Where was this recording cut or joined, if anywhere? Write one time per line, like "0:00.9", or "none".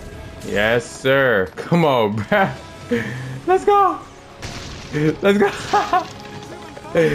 0:01.6